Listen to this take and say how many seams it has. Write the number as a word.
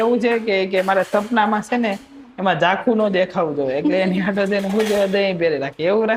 zero